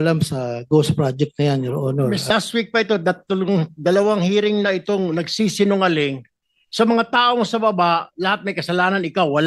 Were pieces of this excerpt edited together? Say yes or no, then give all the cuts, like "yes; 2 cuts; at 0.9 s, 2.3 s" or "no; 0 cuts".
yes; 1 cut; at 2.3 s